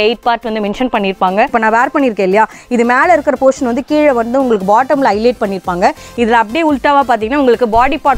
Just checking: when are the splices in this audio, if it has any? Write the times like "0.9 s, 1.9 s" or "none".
1.5 s